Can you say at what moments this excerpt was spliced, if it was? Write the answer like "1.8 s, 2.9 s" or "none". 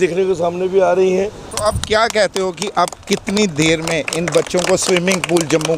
1.4 s